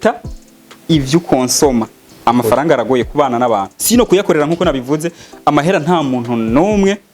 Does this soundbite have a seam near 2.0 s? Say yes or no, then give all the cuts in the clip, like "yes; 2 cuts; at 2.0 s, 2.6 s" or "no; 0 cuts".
yes; 1 cut; at 2.0 s